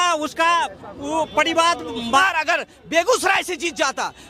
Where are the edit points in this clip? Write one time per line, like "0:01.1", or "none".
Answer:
0:02.2